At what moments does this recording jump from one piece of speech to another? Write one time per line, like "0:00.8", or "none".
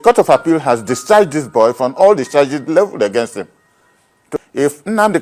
0:04.3

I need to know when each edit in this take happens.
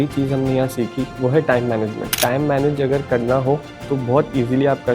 0:02.2

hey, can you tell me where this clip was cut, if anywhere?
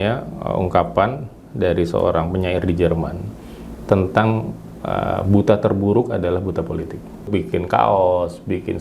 0:07.3

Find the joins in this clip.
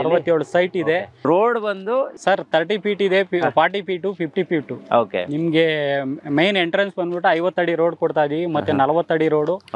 none

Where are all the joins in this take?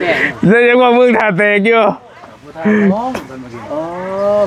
none

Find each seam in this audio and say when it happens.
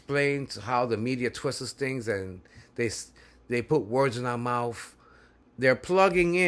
0:05.4

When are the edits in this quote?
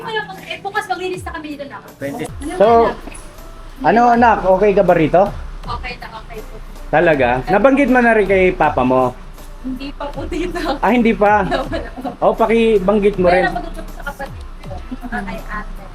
0:02.3

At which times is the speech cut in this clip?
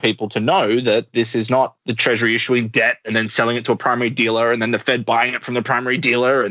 0:01.3

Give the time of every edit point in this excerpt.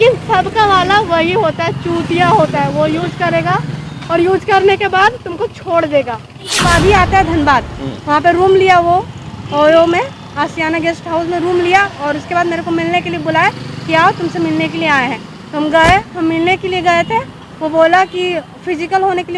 0:06.6

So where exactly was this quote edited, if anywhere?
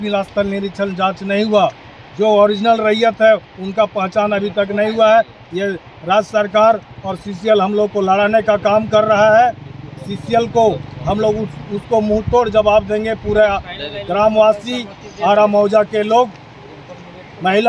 none

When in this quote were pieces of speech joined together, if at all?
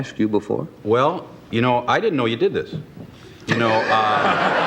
none

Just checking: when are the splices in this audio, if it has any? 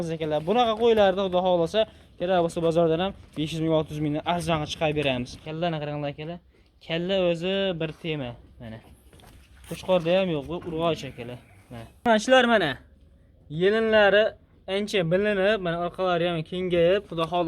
0:05.4
0:12.1

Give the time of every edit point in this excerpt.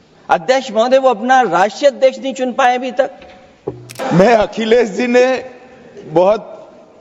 0:03.9

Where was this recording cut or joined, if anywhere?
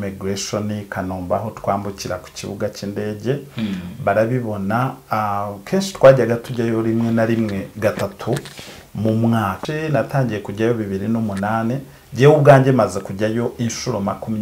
0:09.6

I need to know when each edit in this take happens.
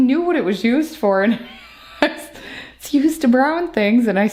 none

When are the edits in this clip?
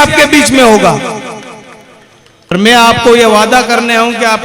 0:02.5

